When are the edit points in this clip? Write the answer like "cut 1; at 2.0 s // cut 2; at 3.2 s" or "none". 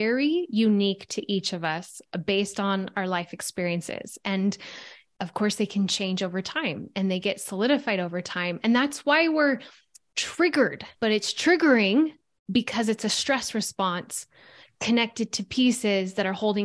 cut 1; at 10.8 s